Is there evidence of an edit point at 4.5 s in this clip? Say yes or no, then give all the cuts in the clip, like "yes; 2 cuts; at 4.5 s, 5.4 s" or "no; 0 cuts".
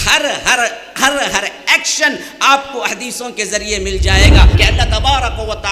yes; 1 cut; at 4.5 s